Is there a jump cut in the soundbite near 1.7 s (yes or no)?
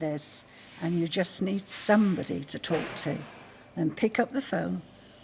no